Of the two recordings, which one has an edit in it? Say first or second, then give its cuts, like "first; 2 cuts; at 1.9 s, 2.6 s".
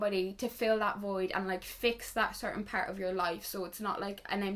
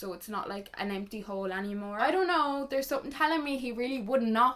second; 1 cut; at 1.9 s